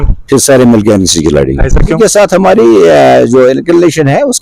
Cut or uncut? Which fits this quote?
cut